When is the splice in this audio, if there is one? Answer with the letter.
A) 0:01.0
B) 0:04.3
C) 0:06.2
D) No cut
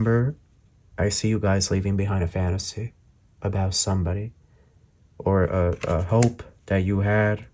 D